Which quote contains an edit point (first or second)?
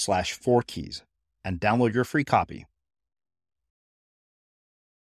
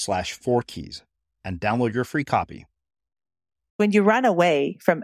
second